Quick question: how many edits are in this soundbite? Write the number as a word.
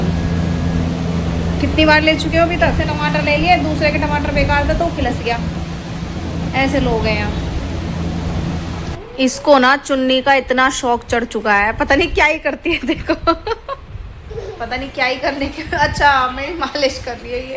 three